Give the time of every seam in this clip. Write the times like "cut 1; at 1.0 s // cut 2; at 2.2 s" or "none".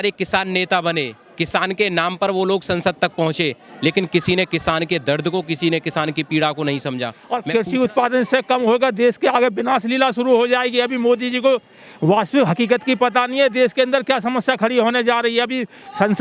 cut 1; at 7.1 s

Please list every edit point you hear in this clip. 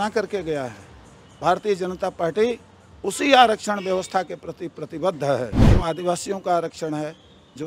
cut 1; at 5.6 s

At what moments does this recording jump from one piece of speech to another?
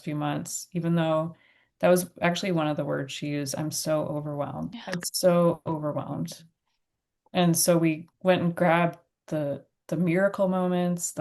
cut 1; at 4.8 s // cut 2; at 8.1 s

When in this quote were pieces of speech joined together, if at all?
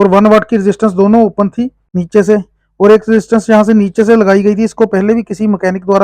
cut 1; at 1.9 s

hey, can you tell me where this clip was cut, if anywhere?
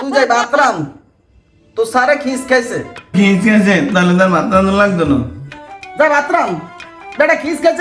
cut 1; at 3.1 s

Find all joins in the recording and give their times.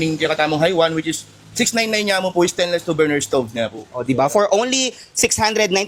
none

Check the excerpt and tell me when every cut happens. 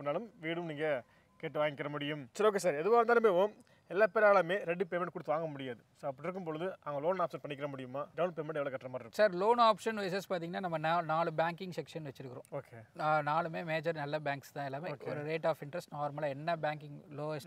none

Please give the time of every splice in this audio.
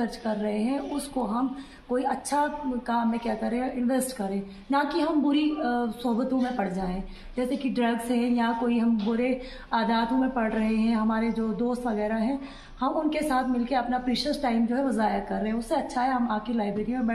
none

